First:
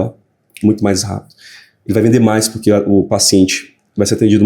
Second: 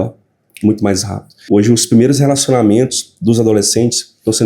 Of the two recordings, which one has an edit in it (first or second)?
second